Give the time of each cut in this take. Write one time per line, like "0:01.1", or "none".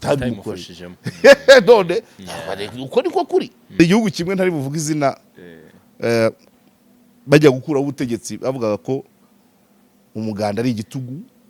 0:03.8